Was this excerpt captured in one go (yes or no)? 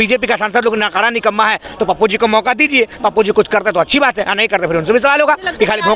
yes